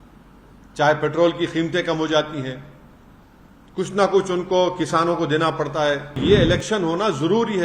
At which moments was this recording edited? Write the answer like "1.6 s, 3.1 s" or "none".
6.2 s